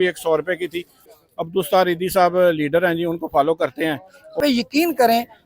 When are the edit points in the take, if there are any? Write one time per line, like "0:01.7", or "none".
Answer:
0:01.1
0:04.4